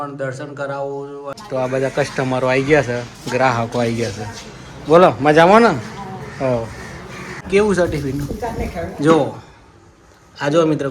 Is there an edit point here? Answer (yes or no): yes